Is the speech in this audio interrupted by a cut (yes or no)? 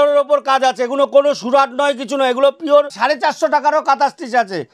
yes